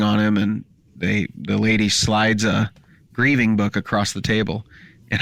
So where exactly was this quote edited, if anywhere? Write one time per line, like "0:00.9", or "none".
none